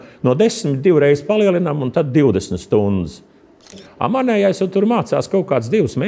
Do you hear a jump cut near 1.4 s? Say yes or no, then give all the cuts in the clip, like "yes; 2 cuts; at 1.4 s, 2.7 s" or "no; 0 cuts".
no; 1 cut; at 3.8 s